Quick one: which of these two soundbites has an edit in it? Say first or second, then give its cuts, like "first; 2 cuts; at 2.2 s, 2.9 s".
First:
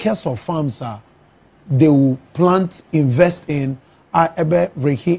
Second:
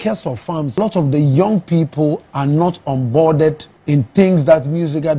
second; 2 cuts; at 0.8 s, 3.7 s